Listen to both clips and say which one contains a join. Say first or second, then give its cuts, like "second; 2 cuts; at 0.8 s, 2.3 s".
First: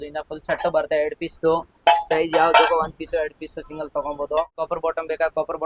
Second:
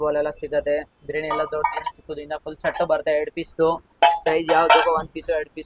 first; 1 cut; at 4.6 s